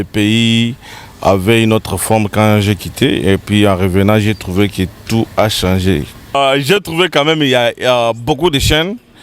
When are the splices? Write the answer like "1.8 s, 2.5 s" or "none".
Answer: 6.4 s